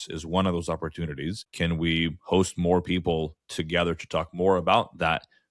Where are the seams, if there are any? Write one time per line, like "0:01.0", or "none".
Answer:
0:01.4